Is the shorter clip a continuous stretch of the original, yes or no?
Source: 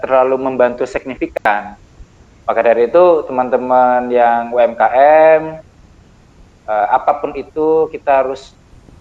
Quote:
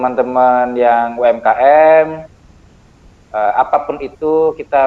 yes